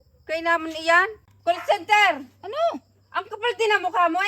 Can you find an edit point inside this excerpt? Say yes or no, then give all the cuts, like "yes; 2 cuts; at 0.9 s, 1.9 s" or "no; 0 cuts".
yes; 1 cut; at 1.2 s